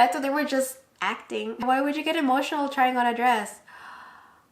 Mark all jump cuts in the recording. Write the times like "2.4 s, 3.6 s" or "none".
1.6 s